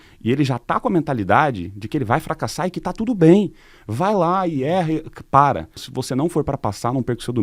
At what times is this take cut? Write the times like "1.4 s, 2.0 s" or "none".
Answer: 5.9 s